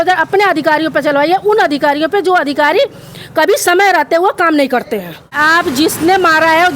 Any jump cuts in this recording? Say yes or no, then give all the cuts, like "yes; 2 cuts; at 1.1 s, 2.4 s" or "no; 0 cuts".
yes; 1 cut; at 5.4 s